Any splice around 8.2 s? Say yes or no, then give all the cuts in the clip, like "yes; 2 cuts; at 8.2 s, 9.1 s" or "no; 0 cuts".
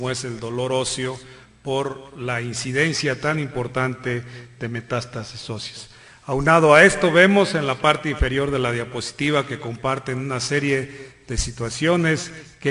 yes; 1 cut; at 8.2 s